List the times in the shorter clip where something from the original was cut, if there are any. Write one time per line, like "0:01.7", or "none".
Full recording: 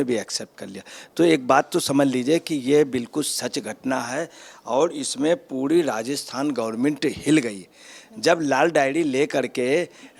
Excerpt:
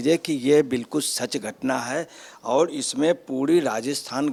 none